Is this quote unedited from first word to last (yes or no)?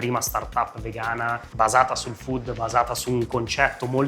no